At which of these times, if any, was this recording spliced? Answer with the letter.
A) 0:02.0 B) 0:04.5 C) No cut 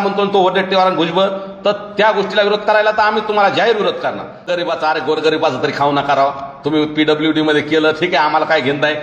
B